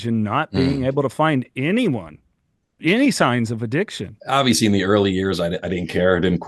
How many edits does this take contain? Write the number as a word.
one